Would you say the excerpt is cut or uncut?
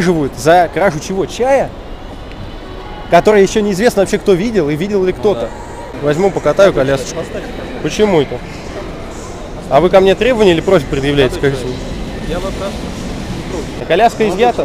cut